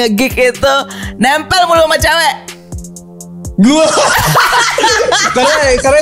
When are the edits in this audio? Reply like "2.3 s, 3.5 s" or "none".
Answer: none

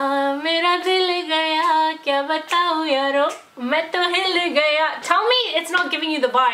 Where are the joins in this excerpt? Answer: none

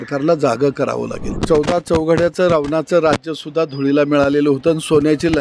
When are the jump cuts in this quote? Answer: 1.3 s

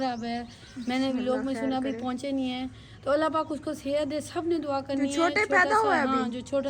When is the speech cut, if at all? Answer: none

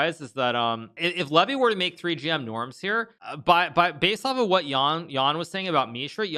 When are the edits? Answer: 0.9 s, 3.2 s

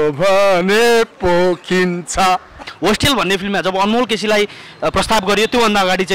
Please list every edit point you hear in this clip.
2.6 s

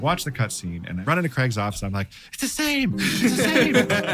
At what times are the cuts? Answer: 1.0 s

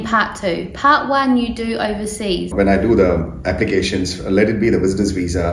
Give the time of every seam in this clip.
2.5 s

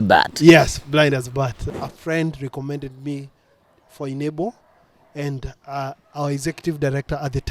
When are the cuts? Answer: 1.6 s

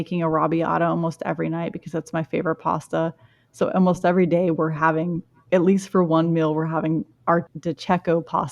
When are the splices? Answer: 7.5 s

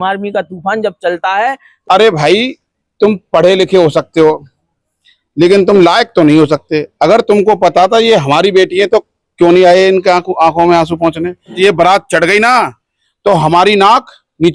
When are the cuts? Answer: 1.7 s, 11.5 s

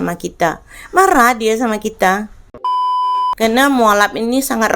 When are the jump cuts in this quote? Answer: 2.9 s

